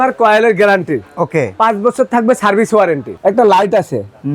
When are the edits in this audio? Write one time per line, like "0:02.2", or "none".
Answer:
0:03.1